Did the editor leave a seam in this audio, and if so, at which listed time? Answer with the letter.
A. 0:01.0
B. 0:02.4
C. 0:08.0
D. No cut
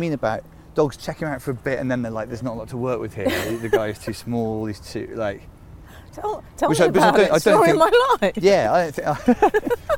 B